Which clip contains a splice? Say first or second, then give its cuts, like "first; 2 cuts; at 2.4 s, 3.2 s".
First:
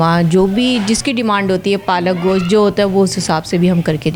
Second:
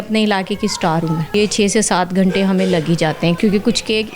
second; 2 cuts; at 1.3 s, 3.4 s